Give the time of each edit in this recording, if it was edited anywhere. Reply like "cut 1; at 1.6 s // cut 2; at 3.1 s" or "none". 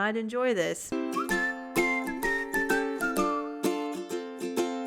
cut 1; at 1.1 s